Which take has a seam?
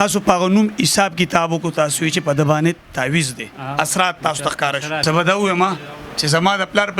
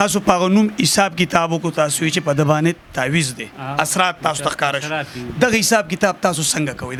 first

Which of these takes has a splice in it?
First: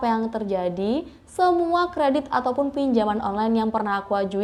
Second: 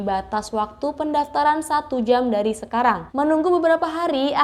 second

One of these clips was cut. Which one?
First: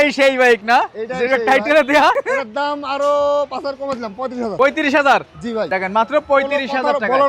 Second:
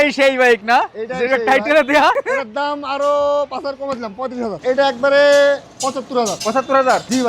second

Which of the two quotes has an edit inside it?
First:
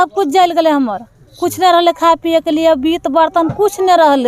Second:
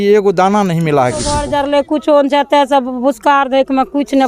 second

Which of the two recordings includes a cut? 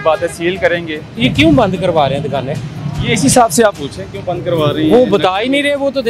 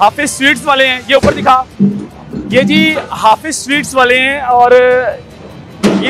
first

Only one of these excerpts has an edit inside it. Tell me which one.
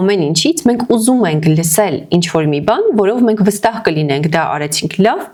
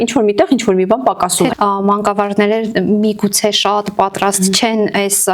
second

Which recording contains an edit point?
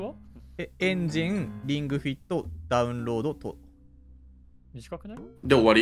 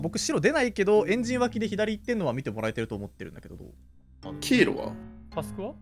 second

